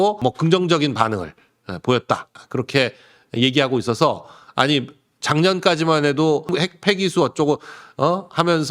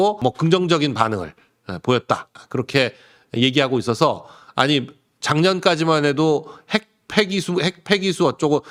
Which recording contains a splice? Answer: first; 1 cut; at 6.5 s

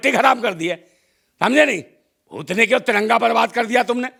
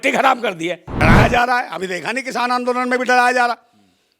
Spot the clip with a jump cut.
second; 1 cut; at 0.9 s

